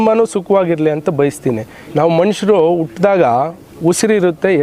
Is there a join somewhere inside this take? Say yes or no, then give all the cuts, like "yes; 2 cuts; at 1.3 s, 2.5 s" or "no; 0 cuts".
yes; 1 cut; at 1.7 s